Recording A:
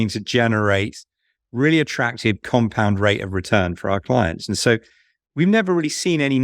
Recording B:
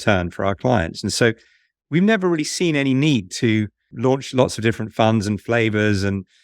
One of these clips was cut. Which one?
B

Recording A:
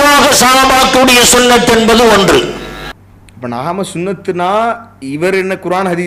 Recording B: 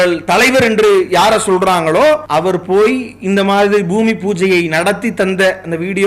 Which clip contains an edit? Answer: B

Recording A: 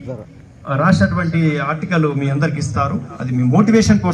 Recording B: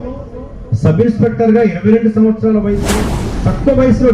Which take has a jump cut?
B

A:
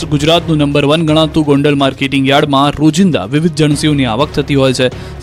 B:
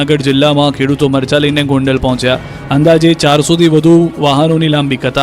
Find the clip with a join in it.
B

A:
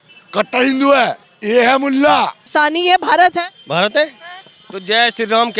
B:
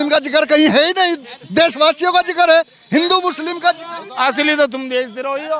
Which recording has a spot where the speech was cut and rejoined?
A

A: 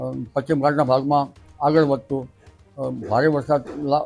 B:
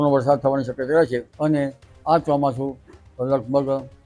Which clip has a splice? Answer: B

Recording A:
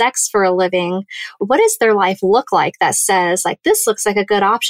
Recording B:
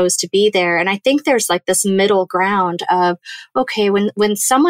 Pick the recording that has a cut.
A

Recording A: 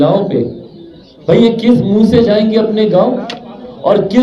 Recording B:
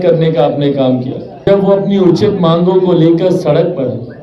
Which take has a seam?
B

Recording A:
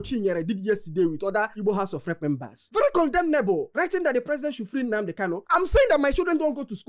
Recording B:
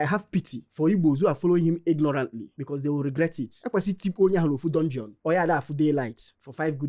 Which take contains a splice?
A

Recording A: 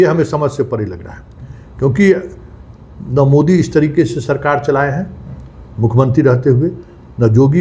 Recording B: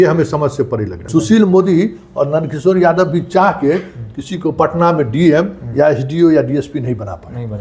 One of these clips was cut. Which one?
B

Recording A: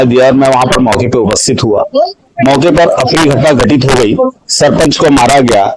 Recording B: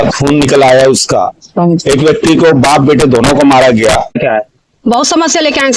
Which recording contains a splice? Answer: B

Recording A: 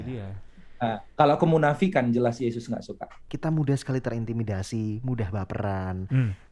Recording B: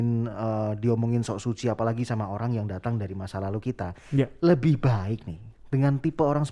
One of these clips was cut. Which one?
A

